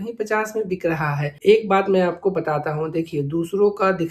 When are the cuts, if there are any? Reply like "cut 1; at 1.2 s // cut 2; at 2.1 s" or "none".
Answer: cut 1; at 1.3 s